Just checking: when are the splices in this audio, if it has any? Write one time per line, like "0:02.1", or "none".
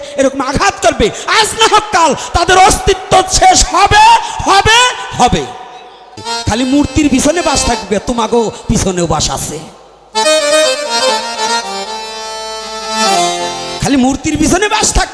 0:06.3